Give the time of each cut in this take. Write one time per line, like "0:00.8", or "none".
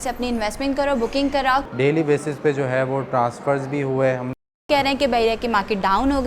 0:01.7
0:04.6